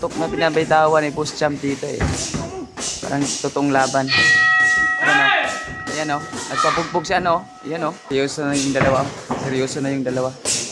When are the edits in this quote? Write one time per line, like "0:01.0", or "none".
0:08.0